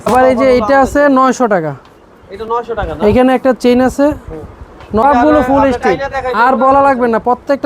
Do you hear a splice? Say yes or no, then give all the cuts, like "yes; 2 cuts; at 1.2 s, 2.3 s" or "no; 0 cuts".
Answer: yes; 1 cut; at 5.0 s